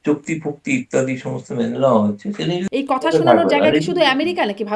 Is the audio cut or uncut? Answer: cut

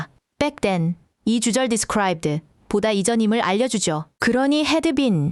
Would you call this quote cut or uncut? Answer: cut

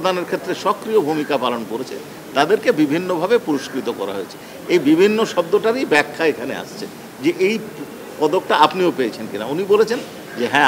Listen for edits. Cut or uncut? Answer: uncut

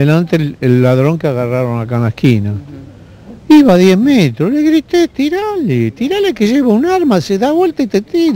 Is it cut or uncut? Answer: uncut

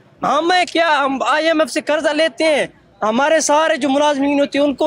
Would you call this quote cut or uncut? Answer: uncut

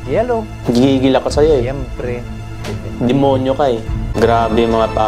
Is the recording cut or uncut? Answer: cut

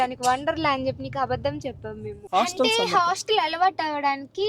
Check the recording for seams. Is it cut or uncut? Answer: cut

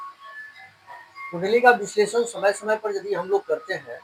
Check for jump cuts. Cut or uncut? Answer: uncut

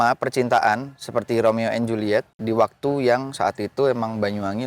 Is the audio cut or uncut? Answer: cut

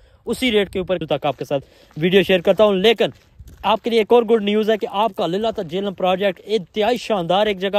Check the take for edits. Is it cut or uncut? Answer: cut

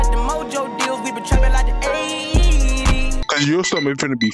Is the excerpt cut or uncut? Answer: cut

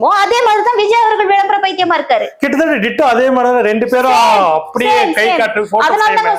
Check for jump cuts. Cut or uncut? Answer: uncut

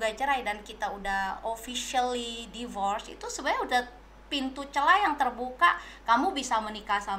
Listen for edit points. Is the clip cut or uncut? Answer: uncut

